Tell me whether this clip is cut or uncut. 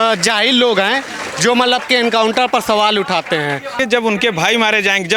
cut